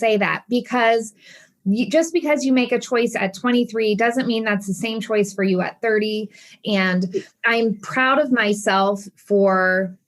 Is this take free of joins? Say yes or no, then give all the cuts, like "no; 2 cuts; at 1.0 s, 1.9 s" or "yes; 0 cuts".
no; 2 cuts; at 1.4 s, 6.5 s